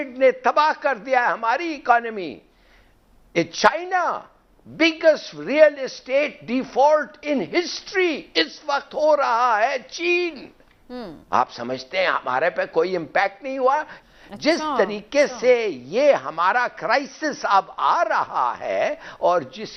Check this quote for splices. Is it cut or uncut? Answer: uncut